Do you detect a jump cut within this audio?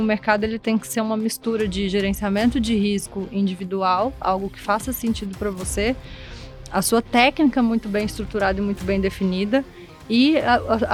no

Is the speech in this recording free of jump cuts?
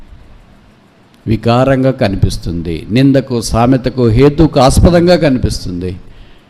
yes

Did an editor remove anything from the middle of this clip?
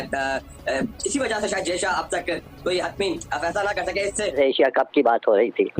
yes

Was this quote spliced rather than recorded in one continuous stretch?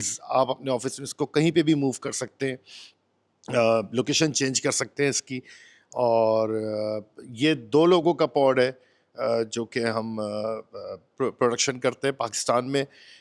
no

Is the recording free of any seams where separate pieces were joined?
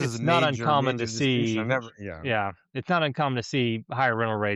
yes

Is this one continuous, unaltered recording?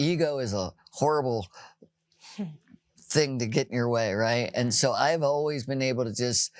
yes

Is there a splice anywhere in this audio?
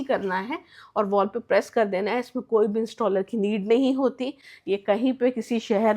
no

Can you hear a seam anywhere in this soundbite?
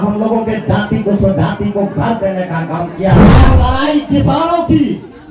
yes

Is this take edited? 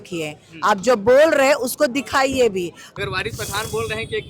yes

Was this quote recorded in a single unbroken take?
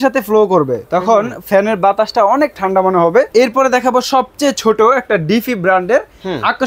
no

